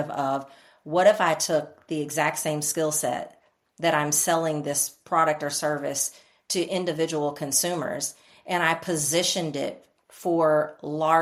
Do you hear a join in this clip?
no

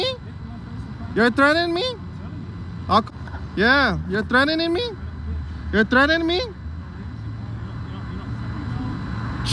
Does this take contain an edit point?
yes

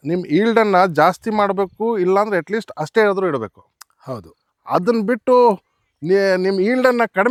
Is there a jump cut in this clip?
no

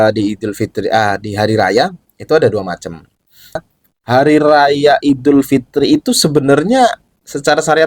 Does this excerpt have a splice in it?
yes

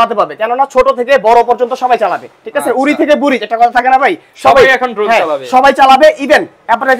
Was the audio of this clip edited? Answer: no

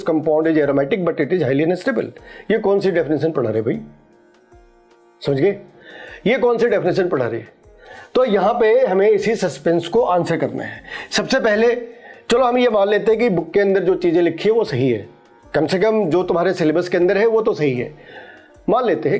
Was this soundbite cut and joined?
no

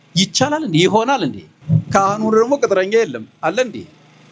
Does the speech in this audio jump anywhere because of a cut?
yes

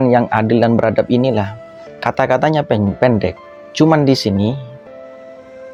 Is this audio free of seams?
yes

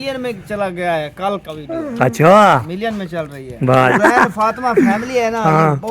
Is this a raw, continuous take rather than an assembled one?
no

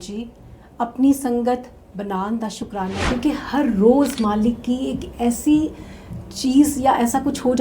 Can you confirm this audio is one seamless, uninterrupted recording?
no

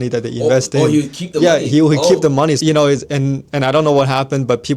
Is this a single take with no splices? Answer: no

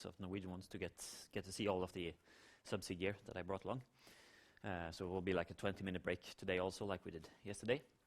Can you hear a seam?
yes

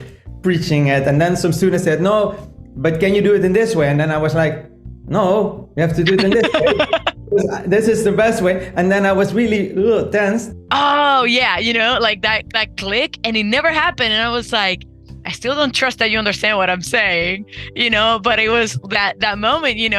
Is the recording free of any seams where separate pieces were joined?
no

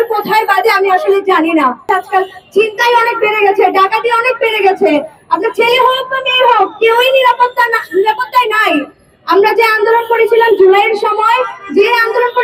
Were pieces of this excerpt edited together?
no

